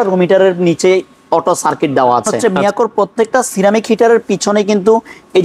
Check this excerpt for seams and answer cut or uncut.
cut